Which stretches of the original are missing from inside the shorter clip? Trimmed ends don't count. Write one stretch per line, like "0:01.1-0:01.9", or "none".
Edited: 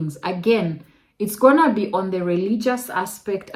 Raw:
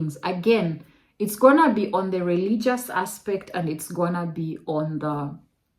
none